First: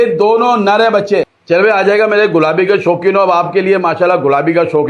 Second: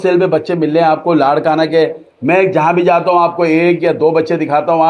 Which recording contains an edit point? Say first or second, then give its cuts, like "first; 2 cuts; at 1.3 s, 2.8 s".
first; 1 cut; at 1.4 s